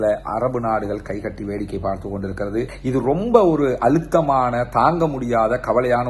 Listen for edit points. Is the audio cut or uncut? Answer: cut